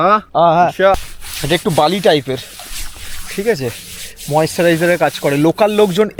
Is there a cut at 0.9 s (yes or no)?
yes